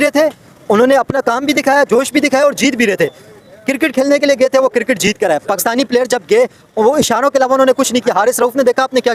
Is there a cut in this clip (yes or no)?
no